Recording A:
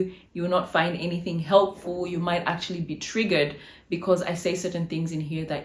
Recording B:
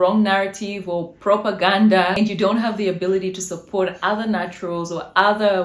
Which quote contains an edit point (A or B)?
B